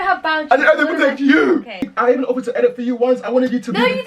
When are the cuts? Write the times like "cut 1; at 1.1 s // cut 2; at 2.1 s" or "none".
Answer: cut 1; at 1.8 s

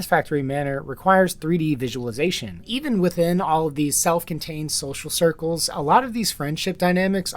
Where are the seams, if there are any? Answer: cut 1; at 2.7 s

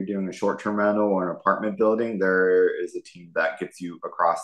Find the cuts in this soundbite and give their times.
none

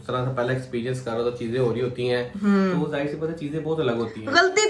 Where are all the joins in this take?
none

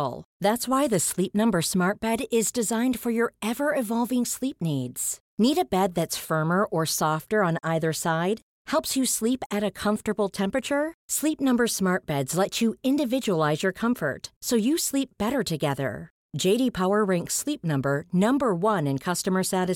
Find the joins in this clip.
none

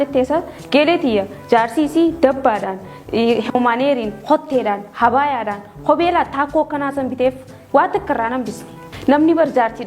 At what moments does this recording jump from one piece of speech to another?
cut 1; at 8.9 s

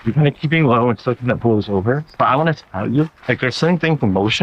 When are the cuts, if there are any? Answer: cut 1; at 2.1 s

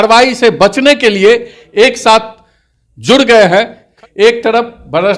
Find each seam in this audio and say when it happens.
cut 1; at 3.9 s

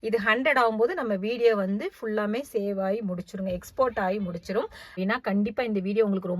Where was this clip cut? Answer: cut 1; at 5.0 s

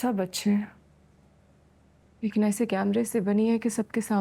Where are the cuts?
none

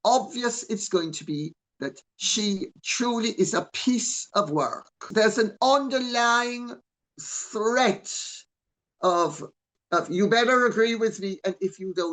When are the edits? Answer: cut 1; at 5.1 s

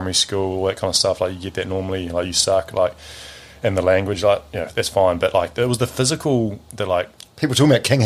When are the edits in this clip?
none

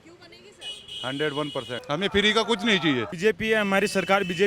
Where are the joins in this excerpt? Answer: cut 1; at 1.7 s // cut 2; at 3.1 s

